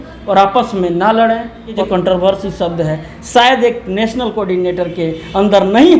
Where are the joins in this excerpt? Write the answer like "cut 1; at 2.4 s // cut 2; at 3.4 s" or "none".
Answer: cut 1; at 1.8 s

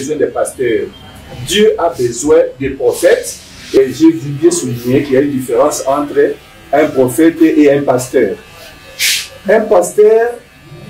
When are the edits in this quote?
cut 1; at 3.8 s

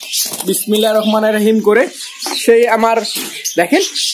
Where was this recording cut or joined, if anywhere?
none

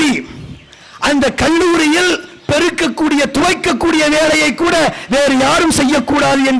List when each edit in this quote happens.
none

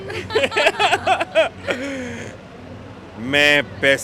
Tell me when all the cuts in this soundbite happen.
none

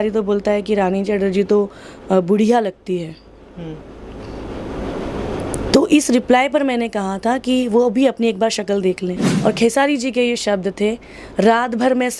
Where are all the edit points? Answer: cut 1; at 9.3 s

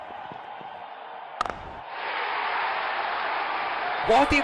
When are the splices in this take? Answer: none

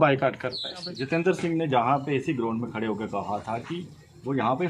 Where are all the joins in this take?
cut 1; at 1.0 s

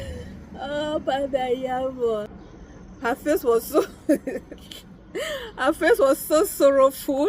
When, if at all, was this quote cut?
cut 1; at 2.3 s

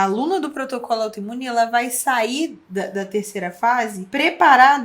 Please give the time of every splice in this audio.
cut 1; at 2.6 s // cut 2; at 4.0 s

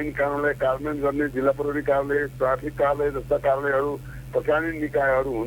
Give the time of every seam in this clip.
none

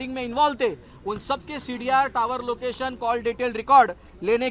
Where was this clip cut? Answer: none

